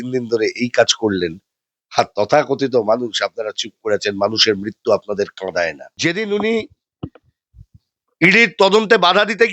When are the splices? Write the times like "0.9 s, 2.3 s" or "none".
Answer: 5.8 s